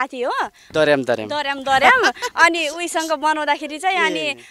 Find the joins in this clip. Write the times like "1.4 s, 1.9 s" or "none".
none